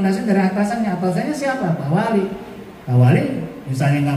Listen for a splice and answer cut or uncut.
uncut